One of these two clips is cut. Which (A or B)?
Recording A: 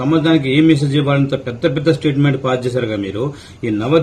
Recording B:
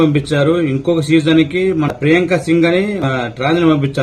B